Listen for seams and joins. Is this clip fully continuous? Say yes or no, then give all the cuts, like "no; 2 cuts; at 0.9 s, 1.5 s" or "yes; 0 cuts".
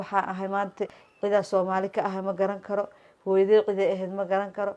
no; 1 cut; at 1.0 s